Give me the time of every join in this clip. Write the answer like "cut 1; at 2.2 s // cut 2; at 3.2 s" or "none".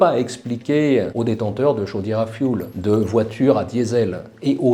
cut 1; at 1.1 s